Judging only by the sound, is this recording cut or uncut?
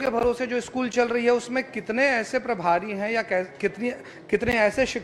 uncut